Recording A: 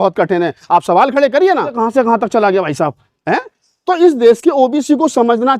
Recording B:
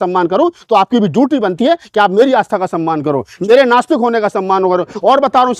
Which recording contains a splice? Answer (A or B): A